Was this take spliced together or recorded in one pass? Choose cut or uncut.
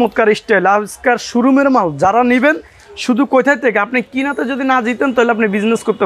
uncut